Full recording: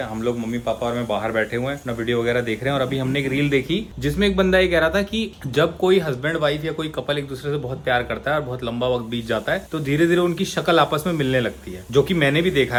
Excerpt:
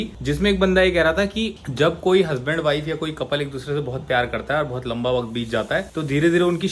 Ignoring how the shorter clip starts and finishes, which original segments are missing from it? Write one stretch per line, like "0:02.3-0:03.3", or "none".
none